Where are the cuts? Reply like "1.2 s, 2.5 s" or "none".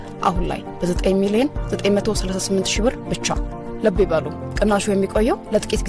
none